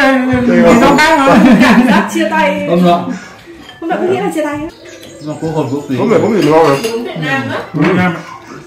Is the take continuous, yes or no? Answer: no